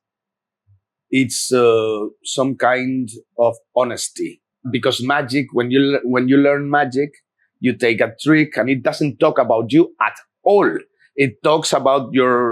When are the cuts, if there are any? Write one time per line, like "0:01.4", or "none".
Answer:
0:04.7